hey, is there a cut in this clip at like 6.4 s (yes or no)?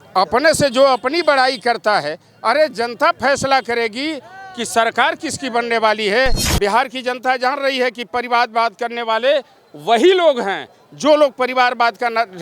yes